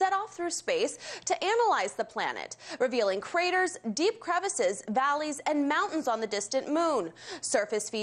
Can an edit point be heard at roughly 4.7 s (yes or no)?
no